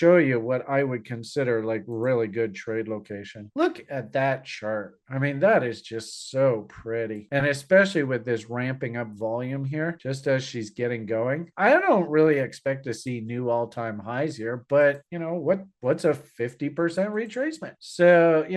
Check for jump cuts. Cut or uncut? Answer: cut